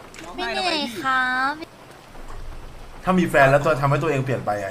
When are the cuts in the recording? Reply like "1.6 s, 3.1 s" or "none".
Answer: 1.6 s

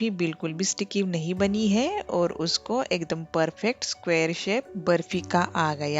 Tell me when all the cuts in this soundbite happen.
4.7 s

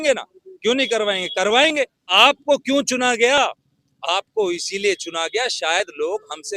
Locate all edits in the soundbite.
2.0 s

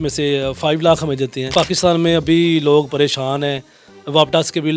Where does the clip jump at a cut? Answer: 1.5 s

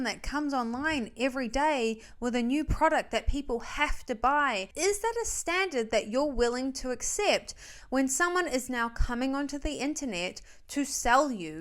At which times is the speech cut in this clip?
4.7 s

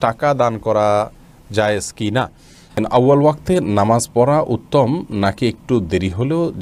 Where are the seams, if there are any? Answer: 2.8 s

